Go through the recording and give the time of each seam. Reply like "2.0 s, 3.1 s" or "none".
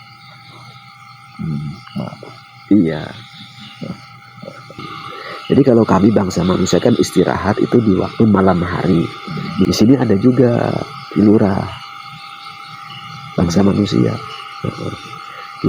4.8 s, 9.7 s